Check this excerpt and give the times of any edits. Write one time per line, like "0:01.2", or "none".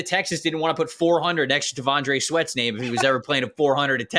none